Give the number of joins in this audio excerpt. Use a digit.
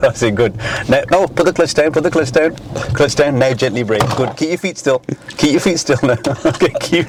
0